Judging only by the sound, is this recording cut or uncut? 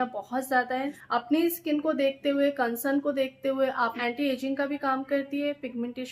cut